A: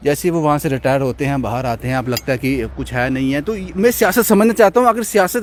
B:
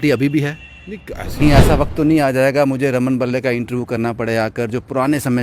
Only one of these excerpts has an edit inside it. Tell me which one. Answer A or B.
B